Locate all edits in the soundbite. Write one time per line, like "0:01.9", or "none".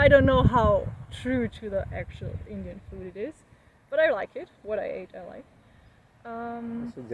none